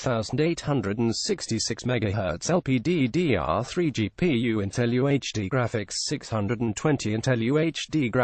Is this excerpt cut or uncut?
uncut